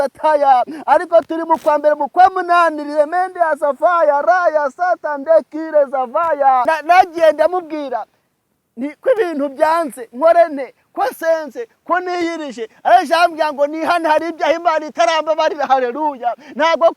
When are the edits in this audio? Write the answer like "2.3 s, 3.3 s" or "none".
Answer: 6.6 s